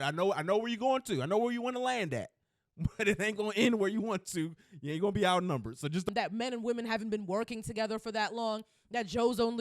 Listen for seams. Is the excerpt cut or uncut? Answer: cut